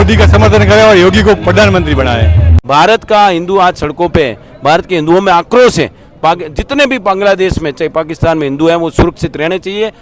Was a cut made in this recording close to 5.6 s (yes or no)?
no